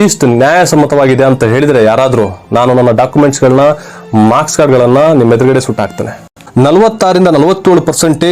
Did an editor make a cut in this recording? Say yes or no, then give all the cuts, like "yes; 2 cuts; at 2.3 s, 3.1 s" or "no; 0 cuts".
yes; 1 cut; at 6.4 s